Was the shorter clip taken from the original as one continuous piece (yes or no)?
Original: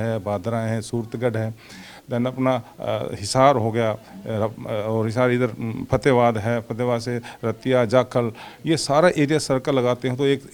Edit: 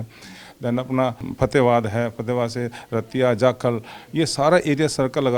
no